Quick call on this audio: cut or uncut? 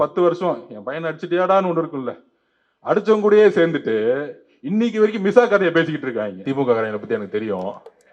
cut